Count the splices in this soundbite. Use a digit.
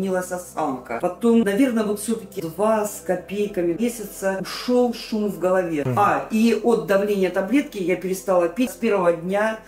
3